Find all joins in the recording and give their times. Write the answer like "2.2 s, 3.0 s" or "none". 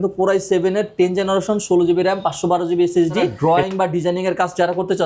3.4 s